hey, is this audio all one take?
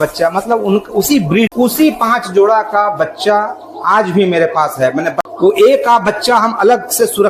no; 2 cuts; at 1.5 s, 5.2 s

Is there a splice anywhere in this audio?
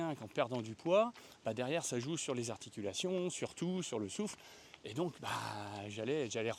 no; 0 cuts

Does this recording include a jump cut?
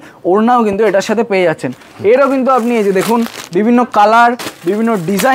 no; 0 cuts

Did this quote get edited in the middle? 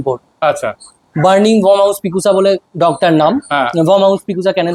no; 0 cuts

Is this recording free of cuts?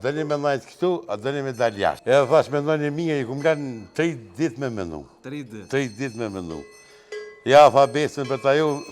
no; 1 cut; at 2.0 s

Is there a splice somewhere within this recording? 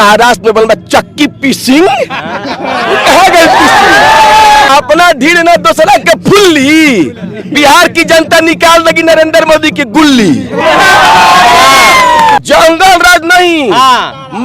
yes; 2 cuts; at 4.7 s, 12.4 s

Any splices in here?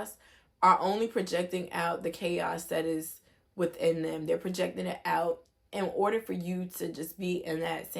no; 0 cuts

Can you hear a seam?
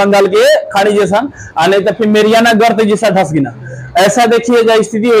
no; 0 cuts

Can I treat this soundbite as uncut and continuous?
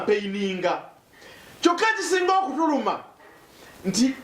yes; 0 cuts

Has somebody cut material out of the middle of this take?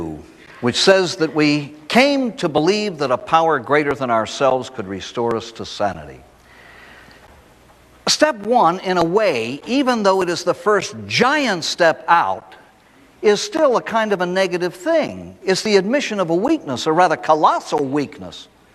no; 0 cuts

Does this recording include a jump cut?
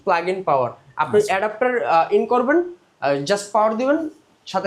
no; 0 cuts

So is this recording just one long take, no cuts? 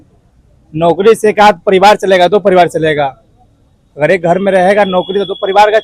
yes; 0 cuts

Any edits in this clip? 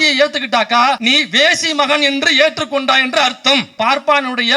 yes; 2 cuts; at 1.0 s, 3.7 s

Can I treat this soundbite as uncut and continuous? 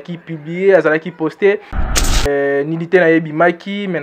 no; 1 cut; at 2.1 s

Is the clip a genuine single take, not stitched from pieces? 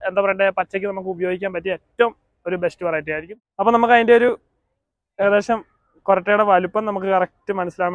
no; 1 cut; at 3.3 s

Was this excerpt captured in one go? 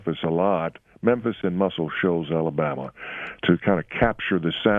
yes; 0 cuts

